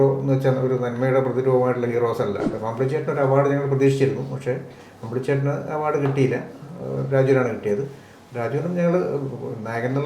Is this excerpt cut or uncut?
cut